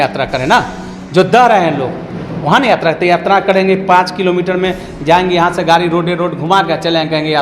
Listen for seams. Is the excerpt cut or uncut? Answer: uncut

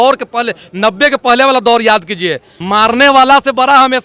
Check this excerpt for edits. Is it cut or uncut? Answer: cut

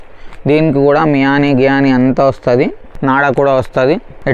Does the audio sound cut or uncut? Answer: uncut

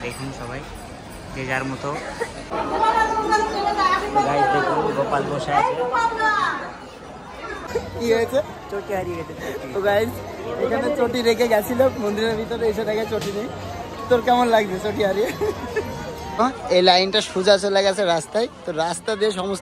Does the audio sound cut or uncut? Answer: cut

